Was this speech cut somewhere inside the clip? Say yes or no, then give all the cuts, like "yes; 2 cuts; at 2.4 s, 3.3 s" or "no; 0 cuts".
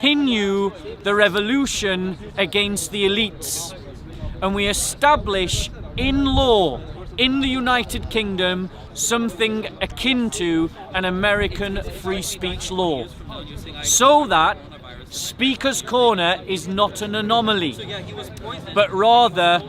no; 0 cuts